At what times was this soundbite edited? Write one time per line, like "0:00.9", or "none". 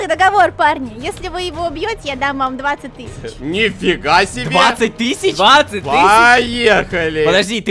none